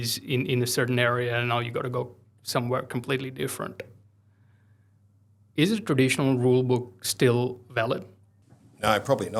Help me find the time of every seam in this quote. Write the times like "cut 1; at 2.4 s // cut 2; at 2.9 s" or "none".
none